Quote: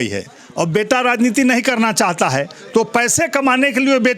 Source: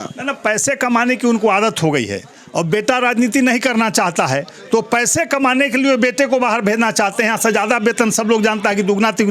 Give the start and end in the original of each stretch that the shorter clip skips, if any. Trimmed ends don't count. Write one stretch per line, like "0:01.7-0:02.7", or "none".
none

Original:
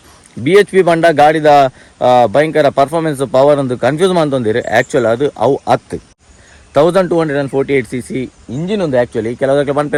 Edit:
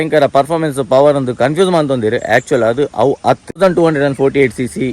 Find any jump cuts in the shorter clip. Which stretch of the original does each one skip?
0:06.0-0:06.9

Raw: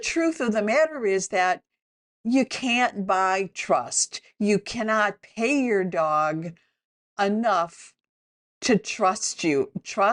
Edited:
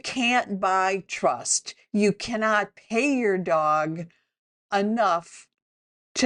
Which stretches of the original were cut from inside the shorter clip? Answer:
none

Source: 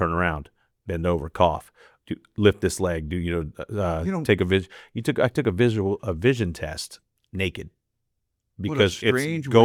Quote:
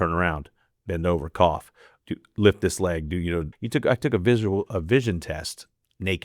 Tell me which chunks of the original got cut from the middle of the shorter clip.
0:03.5-0:04.9

